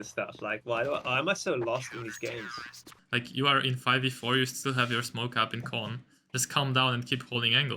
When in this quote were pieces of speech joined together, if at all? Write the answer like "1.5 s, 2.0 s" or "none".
3.0 s